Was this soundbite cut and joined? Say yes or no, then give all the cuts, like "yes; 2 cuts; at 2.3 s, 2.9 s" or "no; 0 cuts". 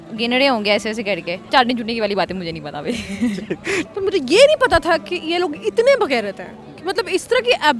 yes; 2 cuts; at 1.4 s, 3.8 s